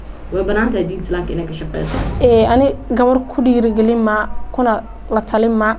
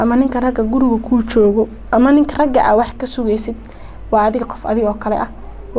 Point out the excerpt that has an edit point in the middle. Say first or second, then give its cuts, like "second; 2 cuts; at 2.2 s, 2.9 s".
first; 1 cut; at 2.0 s